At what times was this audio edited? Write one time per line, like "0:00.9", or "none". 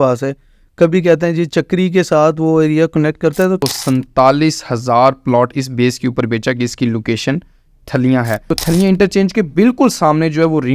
0:03.6
0:08.4